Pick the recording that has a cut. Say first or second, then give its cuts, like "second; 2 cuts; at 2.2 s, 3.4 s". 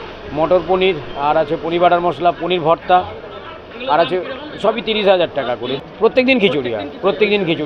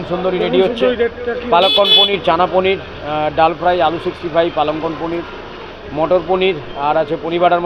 first; 1 cut; at 5.8 s